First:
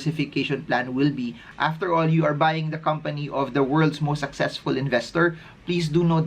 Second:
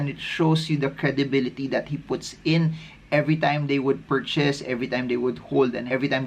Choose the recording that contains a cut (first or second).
first